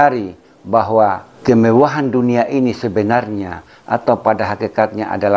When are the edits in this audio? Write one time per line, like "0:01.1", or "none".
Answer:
0:01.3